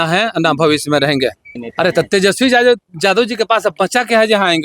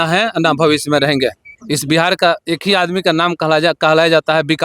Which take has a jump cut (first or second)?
first